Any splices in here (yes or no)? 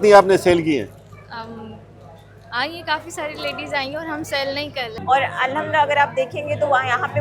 yes